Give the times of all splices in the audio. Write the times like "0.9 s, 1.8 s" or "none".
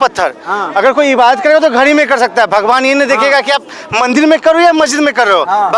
none